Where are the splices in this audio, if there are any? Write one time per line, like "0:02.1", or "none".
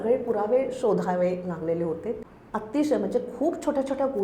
0:02.3

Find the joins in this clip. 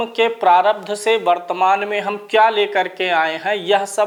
none

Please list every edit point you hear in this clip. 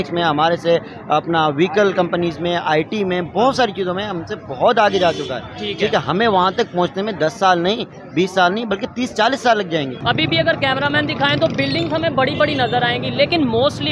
0:10.0

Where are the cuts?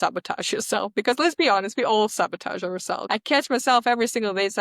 0:03.0

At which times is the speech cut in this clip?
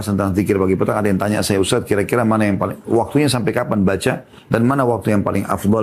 none

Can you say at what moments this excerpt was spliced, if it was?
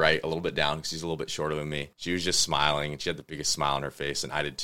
none

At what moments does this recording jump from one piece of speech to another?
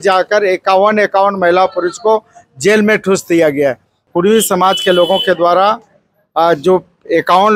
0:04.1

